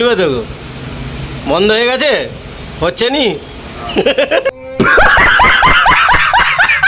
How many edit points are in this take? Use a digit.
1